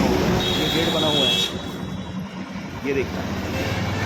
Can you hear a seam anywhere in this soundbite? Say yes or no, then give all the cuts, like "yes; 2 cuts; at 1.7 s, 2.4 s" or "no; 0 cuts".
no; 0 cuts